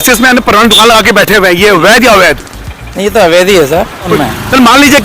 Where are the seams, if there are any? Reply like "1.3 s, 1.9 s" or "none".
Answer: 4.1 s